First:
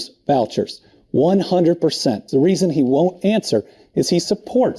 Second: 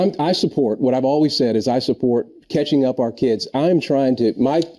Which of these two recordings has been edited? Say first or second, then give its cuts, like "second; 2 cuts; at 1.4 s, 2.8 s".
first; 1 cut; at 2.2 s